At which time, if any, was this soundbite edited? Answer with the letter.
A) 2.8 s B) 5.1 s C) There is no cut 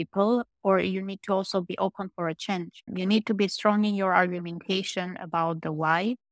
A